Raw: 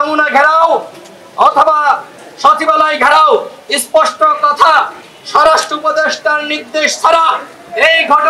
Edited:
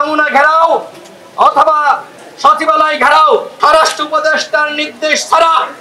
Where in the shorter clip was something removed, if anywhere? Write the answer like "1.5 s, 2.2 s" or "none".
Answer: 3.5 s